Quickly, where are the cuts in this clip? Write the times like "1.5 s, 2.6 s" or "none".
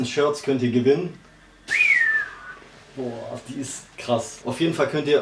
1.5 s, 4.4 s